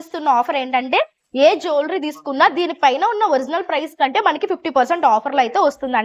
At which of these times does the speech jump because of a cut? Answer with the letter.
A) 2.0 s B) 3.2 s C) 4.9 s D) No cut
D